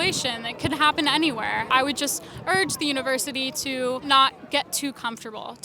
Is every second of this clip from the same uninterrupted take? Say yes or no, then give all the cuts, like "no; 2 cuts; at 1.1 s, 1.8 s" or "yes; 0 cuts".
no; 2 cuts; at 1.7 s, 4.0 s